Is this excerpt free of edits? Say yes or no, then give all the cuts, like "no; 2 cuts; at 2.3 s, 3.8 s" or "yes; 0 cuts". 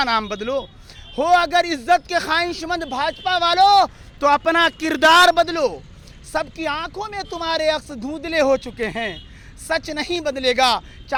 yes; 0 cuts